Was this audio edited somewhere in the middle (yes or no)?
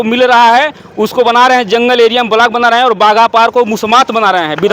no